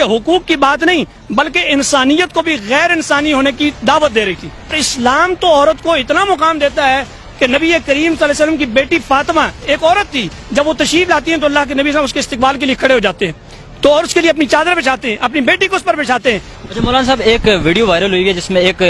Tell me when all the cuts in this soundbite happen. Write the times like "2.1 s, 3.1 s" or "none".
4.8 s, 16.5 s